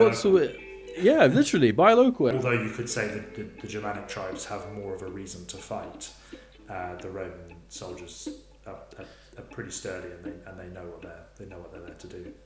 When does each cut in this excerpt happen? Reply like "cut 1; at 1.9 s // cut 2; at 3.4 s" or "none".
cut 1; at 2.3 s